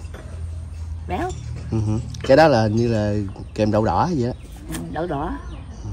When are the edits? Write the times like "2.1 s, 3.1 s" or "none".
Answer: none